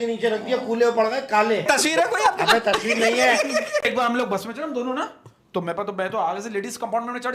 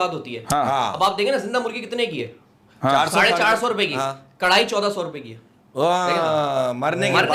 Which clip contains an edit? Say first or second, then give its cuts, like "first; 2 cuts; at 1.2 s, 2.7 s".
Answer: first; 2 cuts; at 1.6 s, 3.9 s